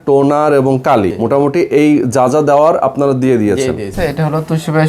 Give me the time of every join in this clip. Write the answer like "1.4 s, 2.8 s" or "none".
1.1 s, 3.9 s